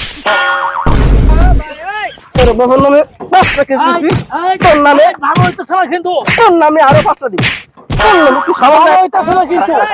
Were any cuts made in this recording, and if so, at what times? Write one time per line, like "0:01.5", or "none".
0:01.7